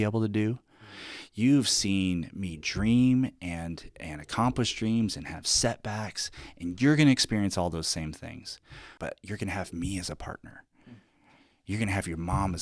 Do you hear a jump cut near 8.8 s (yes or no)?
yes